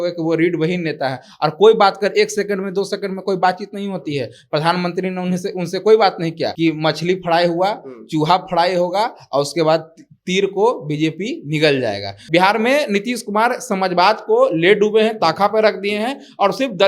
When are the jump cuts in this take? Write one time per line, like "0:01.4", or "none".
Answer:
0:06.5
0:12.2

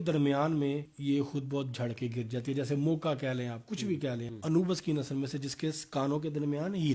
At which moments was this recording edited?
0:00.9
0:04.3

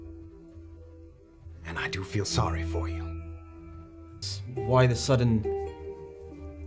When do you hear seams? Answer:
0:04.3

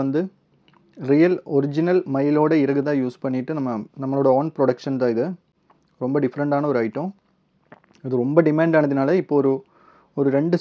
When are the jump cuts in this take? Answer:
none

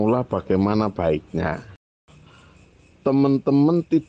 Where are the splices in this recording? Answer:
0:01.9

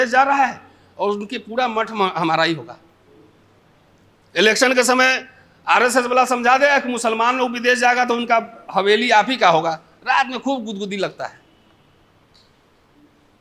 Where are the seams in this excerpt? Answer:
none

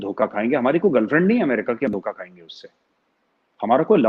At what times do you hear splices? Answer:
none

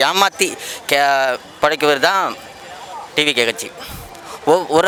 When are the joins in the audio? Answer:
none

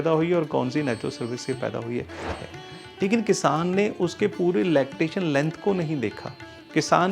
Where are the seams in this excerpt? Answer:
0:02.2

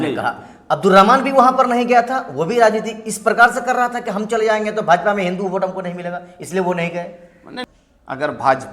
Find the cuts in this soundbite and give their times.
0:07.5

